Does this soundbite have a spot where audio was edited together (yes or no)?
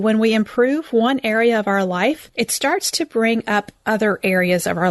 yes